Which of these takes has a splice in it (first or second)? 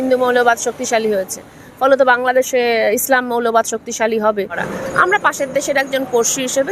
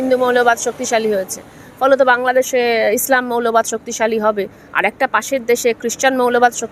first